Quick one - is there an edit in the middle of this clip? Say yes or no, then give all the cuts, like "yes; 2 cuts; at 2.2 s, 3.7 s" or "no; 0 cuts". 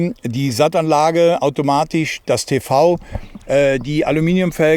no; 0 cuts